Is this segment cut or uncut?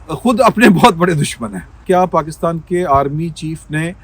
cut